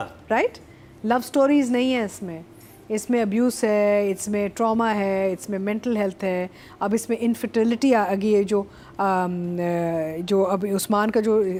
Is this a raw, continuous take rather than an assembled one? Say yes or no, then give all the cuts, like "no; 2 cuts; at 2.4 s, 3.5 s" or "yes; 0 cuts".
yes; 0 cuts